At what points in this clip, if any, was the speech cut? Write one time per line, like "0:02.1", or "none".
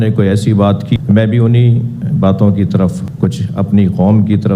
0:01.0